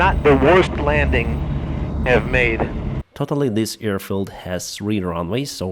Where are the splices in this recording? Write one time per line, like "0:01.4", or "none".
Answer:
0:03.0